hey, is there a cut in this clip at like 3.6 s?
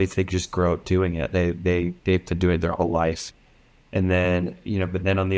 no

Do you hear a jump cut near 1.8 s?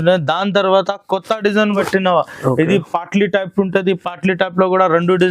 yes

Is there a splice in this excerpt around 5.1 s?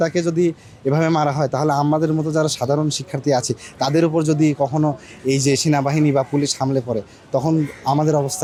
no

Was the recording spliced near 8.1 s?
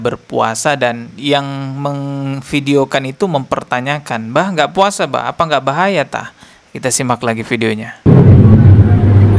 yes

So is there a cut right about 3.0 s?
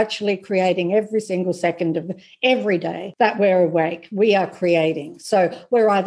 yes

